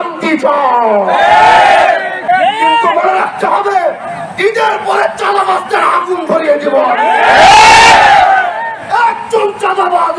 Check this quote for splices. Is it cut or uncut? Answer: cut